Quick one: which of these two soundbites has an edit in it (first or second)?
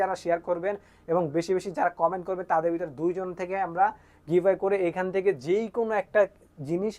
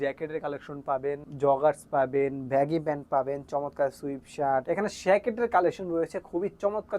second